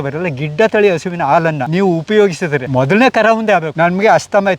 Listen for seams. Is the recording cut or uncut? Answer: cut